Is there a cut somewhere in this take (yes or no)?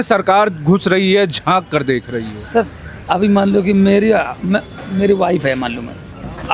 no